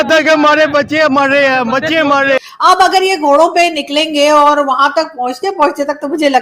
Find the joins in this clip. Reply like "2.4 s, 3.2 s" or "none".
2.4 s

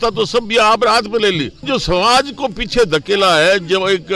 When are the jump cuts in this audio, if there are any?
1.7 s

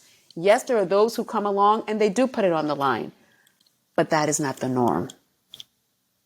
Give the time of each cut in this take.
none

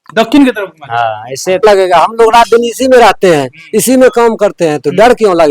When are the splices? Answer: 1.6 s

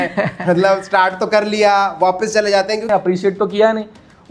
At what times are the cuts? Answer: 2.8 s

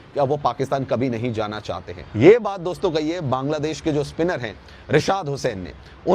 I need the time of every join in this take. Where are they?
1.8 s

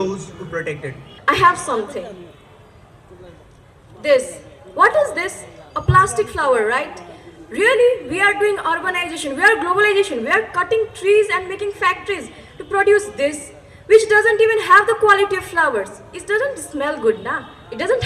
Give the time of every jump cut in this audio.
1.1 s

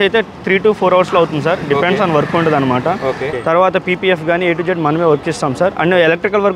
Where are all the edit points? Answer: 3.3 s

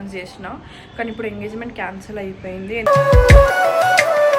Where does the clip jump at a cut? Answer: none

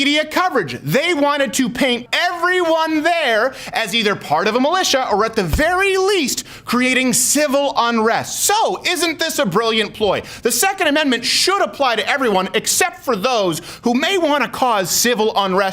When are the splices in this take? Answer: 2.0 s

